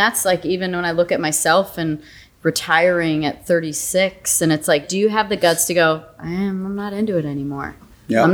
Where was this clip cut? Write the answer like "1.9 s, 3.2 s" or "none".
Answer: 4.9 s

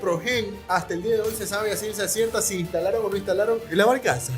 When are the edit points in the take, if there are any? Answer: none

